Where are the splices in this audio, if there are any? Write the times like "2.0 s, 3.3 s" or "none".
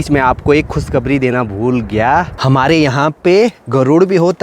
2.3 s